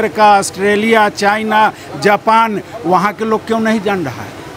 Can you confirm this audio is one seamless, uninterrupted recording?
yes; 0 cuts

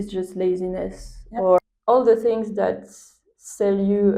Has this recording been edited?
yes; 1 cut; at 1.6 s

